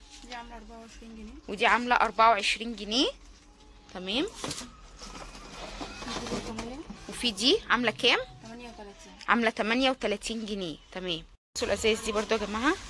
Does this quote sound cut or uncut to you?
cut